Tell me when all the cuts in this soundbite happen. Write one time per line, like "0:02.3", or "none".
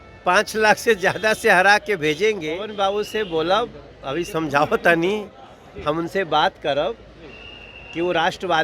0:02.7